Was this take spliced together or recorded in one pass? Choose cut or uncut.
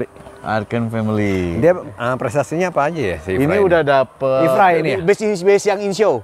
uncut